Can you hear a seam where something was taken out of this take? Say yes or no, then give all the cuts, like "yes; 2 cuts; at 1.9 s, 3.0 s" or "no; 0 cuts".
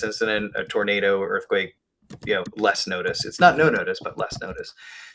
yes; 1 cut; at 1.0 s